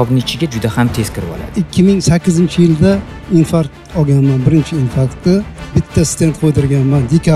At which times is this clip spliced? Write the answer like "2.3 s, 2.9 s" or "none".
1.6 s, 5.6 s